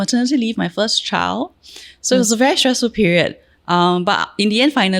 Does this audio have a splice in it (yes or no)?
no